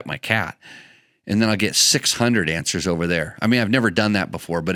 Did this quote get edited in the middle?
no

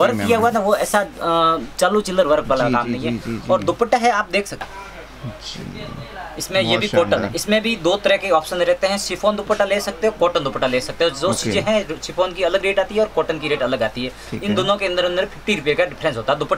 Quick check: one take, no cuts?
no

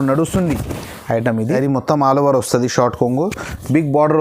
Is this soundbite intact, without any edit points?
no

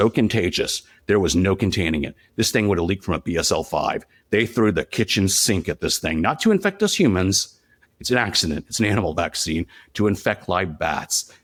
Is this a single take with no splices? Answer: yes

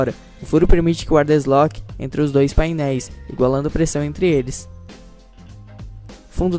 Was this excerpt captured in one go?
yes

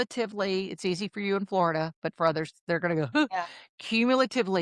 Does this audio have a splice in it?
no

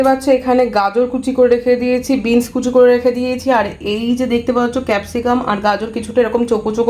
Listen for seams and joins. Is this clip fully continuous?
yes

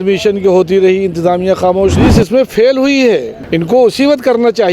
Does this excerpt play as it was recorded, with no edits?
no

